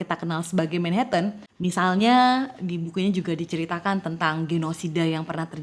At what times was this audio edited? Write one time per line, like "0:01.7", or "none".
0:01.5

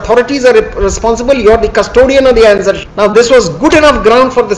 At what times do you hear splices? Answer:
0:02.9

